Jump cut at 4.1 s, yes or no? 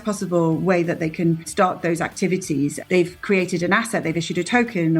no